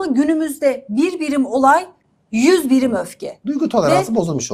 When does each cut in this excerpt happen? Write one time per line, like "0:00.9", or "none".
none